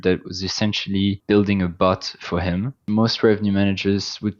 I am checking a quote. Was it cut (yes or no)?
yes